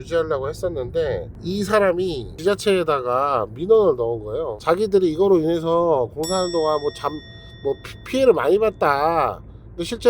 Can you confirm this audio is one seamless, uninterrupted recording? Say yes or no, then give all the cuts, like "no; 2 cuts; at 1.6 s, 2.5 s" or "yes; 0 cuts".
no; 3 cuts; at 1.3 s, 2.3 s, 4.6 s